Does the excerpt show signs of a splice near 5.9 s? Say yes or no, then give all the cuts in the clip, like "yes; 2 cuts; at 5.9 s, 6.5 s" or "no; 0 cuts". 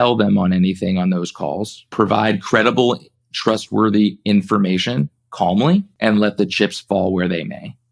yes; 2 cuts; at 1.8 s, 5.9 s